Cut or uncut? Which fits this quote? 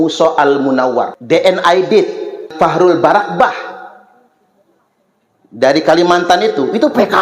cut